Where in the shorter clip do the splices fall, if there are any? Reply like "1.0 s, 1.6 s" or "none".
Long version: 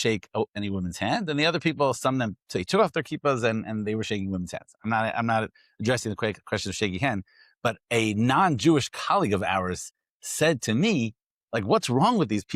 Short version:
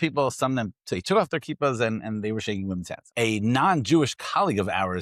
3.1 s

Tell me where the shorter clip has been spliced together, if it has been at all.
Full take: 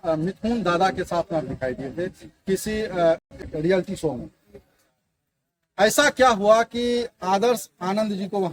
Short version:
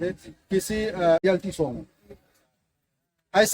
1.2 s

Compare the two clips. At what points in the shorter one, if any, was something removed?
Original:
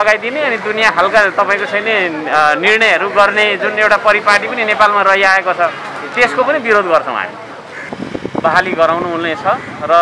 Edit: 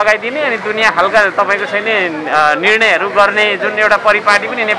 none

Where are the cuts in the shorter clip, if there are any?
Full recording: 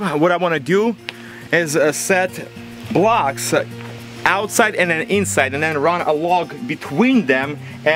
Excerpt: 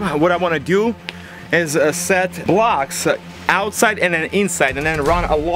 2.4 s, 3.3 s

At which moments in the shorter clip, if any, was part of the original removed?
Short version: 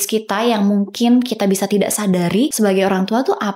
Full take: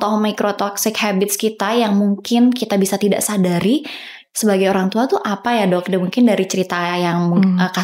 2.5 s

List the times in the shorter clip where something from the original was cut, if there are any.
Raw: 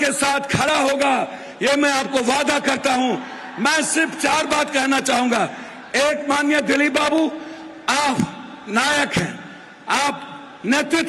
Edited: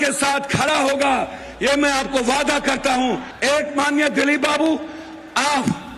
3.3 s

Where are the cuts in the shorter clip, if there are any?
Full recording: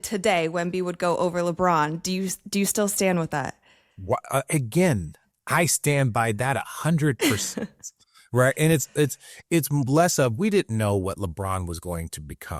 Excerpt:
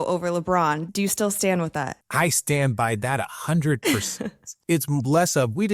0.9 s, 2.0 s, 4.5 s

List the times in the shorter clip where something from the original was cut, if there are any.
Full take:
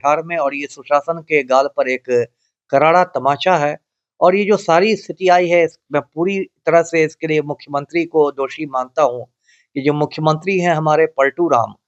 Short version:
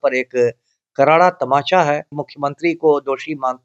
2.3 s

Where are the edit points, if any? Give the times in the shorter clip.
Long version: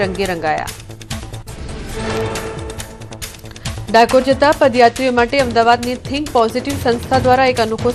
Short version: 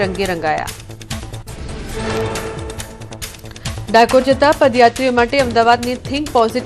none

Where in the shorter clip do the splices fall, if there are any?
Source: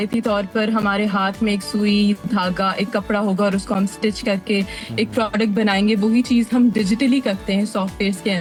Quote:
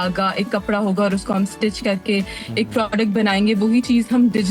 none

